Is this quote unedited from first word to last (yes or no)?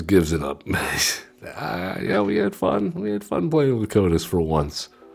yes